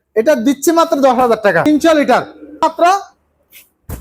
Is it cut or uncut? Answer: cut